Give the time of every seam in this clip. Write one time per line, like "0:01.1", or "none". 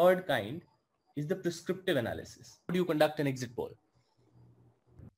0:02.7